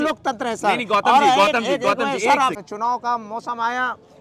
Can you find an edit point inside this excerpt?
yes; 1 cut; at 2.6 s

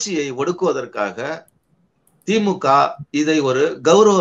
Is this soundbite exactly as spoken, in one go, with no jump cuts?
yes; 0 cuts

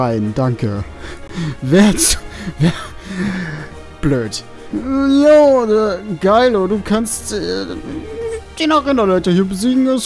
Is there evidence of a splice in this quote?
no; 0 cuts

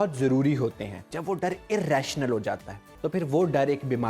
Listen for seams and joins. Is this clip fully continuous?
no; 2 cuts; at 1.1 s, 2.9 s

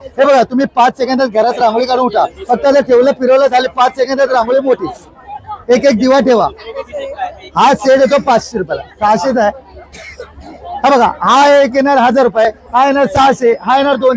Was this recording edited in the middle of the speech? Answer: no; 0 cuts

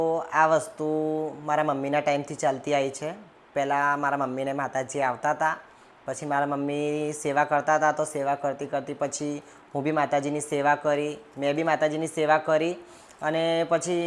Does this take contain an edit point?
no; 0 cuts

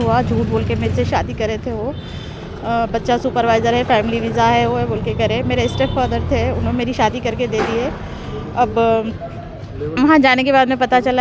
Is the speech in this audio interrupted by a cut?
no; 0 cuts

